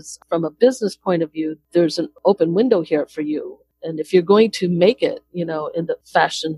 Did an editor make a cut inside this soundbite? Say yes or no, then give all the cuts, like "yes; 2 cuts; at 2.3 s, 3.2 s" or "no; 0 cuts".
yes; 1 cut; at 2.2 s